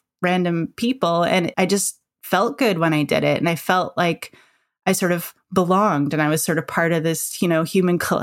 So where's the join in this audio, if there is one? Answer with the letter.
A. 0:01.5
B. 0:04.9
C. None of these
A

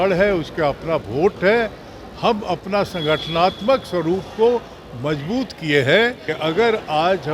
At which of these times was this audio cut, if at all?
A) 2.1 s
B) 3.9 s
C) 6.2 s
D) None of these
C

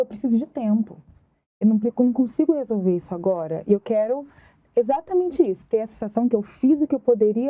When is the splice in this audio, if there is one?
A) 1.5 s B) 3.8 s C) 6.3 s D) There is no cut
D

